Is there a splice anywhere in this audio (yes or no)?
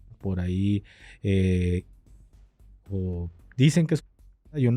no